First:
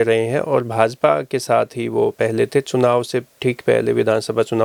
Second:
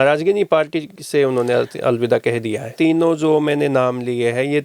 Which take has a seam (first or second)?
second